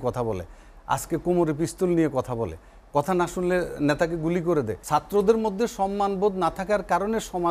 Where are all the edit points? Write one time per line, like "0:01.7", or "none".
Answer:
0:04.8